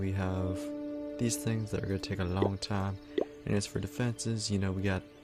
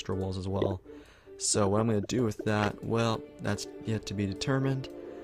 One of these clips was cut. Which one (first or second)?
first